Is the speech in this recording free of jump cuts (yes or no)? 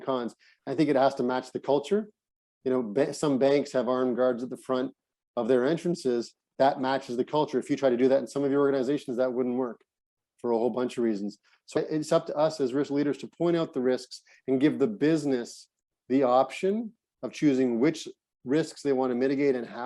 yes